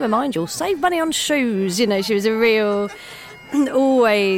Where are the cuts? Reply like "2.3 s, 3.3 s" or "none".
none